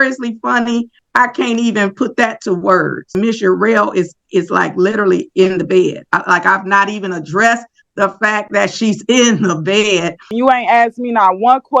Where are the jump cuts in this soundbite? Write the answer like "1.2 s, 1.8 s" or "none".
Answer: 1.0 s, 3.1 s, 10.3 s